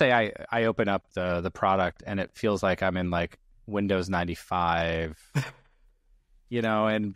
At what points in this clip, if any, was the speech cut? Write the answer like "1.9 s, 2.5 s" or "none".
none